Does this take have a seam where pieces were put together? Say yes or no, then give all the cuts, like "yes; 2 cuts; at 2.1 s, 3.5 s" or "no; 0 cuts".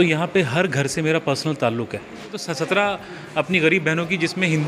yes; 1 cut; at 2.4 s